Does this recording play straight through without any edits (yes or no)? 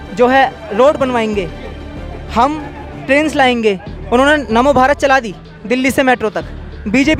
yes